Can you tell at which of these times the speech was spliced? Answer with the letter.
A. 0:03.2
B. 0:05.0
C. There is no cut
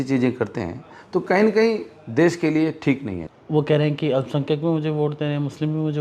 A